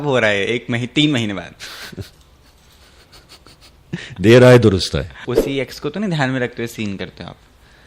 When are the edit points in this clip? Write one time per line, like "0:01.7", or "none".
0:05.2